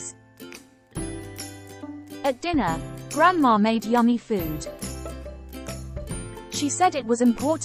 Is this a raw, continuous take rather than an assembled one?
yes; 0 cuts

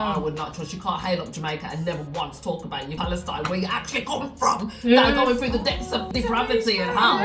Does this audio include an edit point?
yes; 2 cuts; at 2.9 s, 6.1 s

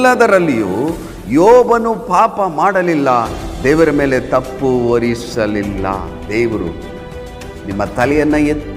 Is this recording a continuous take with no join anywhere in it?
no; 1 cut; at 6.1 s

